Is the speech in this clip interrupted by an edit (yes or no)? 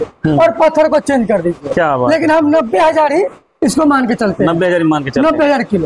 no